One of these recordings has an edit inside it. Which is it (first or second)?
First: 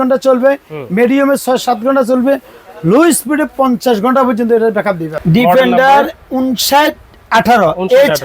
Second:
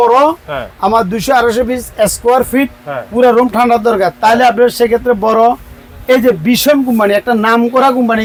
first